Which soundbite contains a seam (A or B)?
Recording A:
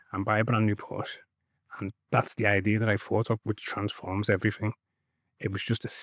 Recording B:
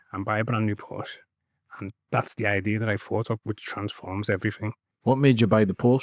B